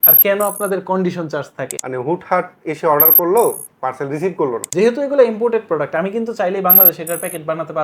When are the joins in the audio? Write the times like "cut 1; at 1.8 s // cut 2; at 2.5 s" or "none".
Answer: cut 1; at 1.8 s // cut 2; at 4.7 s